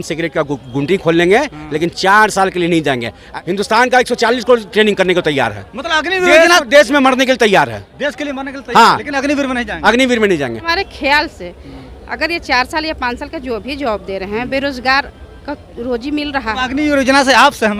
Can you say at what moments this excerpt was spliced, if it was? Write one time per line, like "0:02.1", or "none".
0:03.2
0:10.6
0:16.5